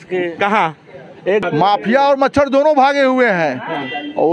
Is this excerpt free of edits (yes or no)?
no